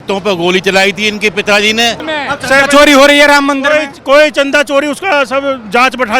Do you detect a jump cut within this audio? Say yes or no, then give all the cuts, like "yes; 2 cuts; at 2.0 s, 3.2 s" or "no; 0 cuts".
yes; 1 cut; at 2.1 s